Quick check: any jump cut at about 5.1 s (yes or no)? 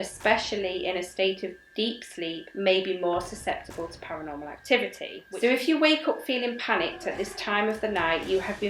yes